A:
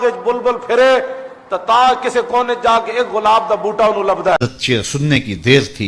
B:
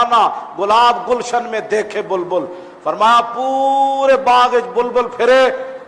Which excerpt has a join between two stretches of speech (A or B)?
A